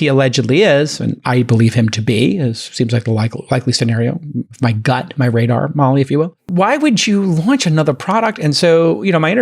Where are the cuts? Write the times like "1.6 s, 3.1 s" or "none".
6.5 s